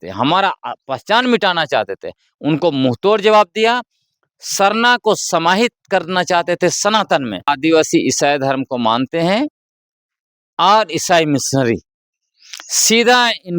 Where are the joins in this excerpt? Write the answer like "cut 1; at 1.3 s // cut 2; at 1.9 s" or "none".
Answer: cut 1; at 7.5 s